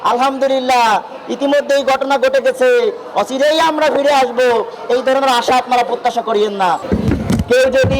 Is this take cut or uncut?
cut